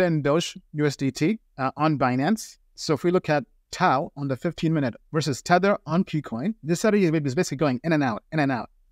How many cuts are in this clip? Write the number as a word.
one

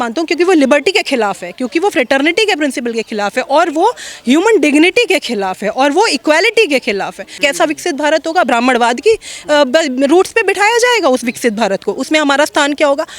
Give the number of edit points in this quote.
one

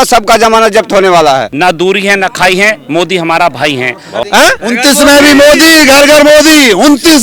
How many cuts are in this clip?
two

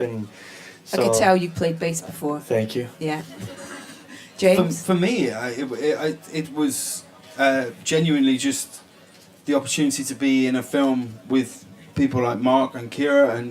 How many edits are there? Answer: one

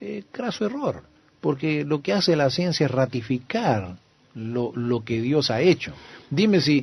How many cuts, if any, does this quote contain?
one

